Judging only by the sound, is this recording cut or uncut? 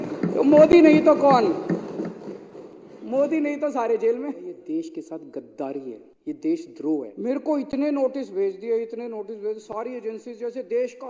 cut